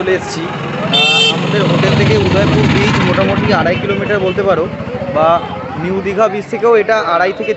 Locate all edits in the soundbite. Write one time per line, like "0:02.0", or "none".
none